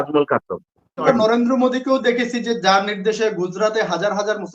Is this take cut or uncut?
cut